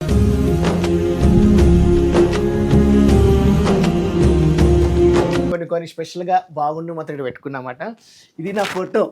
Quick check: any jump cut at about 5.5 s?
yes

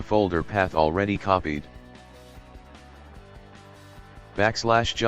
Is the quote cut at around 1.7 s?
yes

